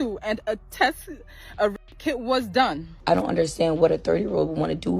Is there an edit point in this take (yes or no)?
yes